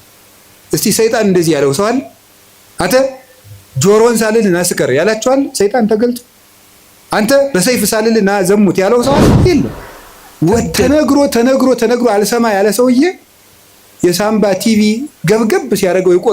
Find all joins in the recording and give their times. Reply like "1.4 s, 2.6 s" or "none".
10.8 s